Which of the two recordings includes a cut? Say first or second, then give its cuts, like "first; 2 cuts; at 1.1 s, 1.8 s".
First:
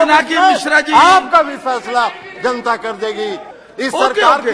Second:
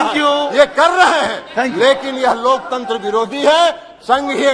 first; 1 cut; at 3.5 s